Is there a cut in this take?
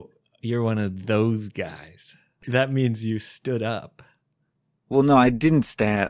yes; 1 cut; at 2.4 s

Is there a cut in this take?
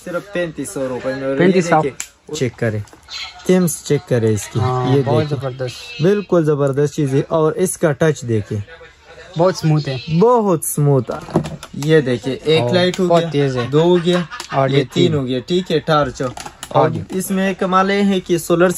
yes; 2 cuts; at 2.3 s, 11.1 s

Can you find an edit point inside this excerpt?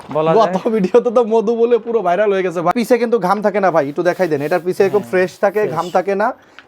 yes; 1 cut; at 2.7 s

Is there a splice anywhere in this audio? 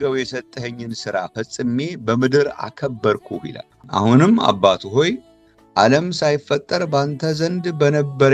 no; 0 cuts

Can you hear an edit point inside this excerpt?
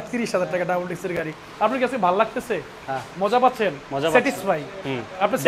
no; 0 cuts

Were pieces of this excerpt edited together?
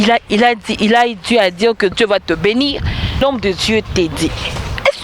yes; 1 cut; at 3.2 s

